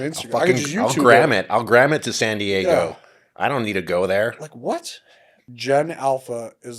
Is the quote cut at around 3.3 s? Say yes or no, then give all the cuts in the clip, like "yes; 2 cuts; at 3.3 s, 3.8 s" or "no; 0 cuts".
no; 1 cut; at 5.5 s